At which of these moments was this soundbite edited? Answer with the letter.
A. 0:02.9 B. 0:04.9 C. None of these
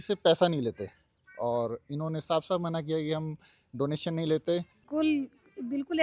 B